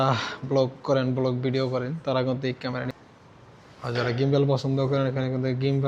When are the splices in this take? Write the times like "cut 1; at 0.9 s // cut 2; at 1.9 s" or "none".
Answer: cut 1; at 2.9 s